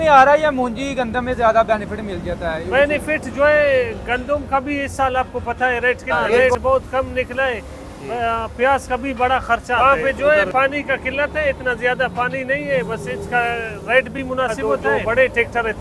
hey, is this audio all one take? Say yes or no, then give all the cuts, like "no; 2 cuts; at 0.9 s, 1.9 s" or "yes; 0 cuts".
no; 3 cuts; at 6.4 s, 9.8 s, 14.7 s